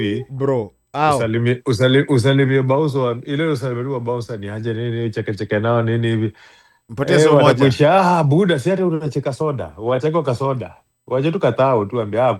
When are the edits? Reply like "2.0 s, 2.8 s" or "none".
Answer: none